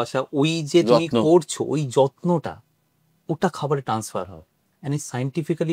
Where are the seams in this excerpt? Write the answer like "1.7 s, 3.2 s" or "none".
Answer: none

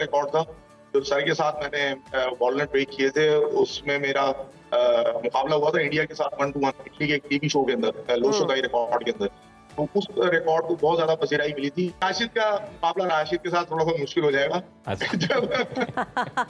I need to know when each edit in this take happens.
12.0 s

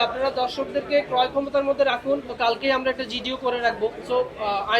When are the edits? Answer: 2.3 s, 4.0 s

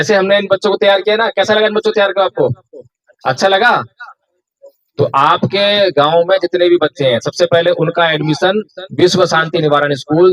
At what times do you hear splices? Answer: none

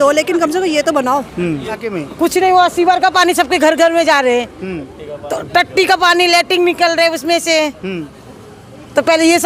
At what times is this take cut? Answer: 1.9 s

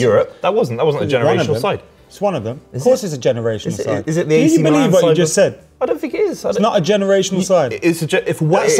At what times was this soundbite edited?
none

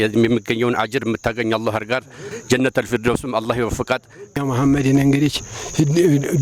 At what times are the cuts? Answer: 2.3 s, 4.4 s

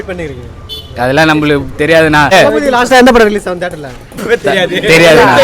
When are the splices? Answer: 2.3 s

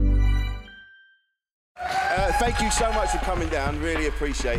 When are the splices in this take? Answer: 1.7 s

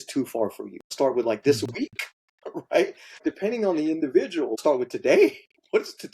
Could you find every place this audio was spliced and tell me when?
0.9 s, 3.2 s, 4.6 s

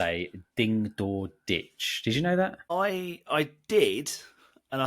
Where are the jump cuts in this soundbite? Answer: 2.7 s

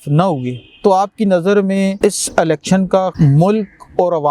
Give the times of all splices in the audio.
2.0 s, 3.1 s

